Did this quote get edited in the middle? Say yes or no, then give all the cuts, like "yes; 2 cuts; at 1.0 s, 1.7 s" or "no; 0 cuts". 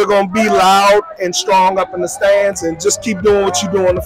no; 0 cuts